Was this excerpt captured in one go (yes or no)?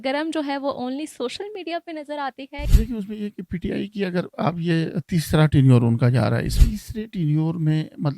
no